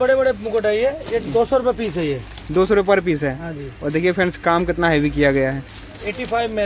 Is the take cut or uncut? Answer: uncut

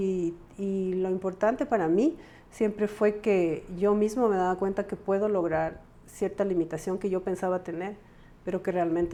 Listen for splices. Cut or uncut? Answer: uncut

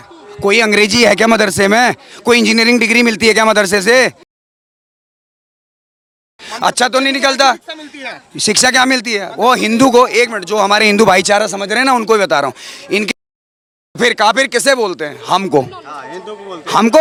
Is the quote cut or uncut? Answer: uncut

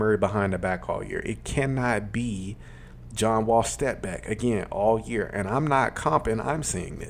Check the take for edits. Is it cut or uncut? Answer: uncut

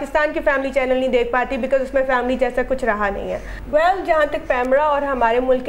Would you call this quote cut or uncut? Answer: cut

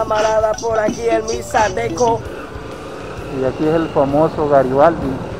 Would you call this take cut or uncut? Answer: cut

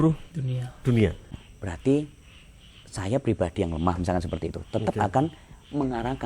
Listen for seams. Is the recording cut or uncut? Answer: cut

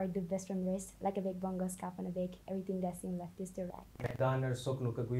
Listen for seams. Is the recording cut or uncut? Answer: cut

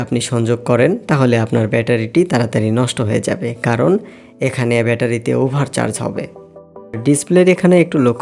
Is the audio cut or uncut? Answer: cut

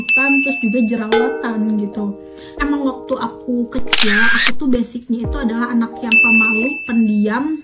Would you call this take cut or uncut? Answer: cut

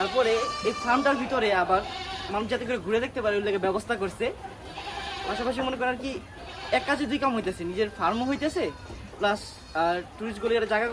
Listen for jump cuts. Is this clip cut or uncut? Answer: uncut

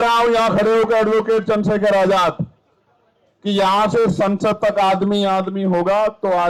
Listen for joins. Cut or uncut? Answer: uncut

